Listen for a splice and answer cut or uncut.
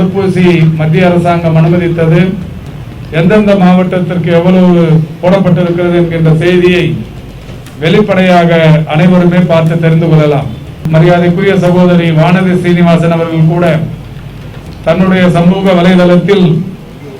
cut